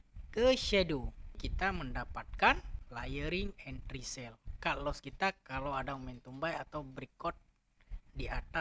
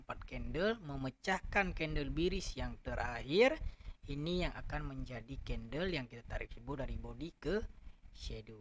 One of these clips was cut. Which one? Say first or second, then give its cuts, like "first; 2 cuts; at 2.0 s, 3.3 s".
first; 2 cuts; at 1.5 s, 2.8 s